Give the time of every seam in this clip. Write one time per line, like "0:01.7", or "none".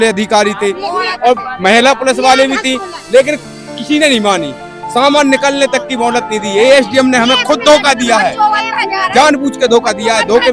none